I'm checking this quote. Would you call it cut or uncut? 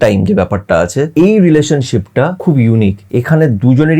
cut